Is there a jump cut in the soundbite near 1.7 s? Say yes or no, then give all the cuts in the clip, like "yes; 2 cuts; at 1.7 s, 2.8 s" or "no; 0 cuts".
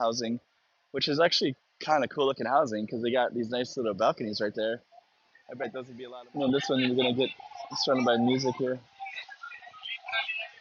no; 1 cut; at 5.9 s